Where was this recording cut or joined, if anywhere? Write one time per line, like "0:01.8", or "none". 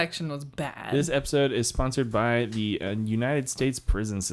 none